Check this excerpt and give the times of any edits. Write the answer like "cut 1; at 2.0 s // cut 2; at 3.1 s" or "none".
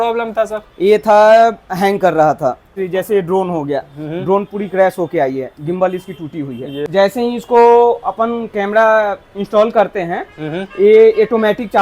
cut 1; at 2.7 s // cut 2; at 6.9 s